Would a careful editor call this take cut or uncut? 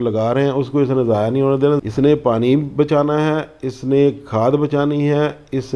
cut